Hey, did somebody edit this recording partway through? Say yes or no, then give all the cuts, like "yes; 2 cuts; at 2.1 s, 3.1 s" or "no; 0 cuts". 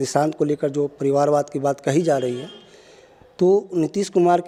no; 0 cuts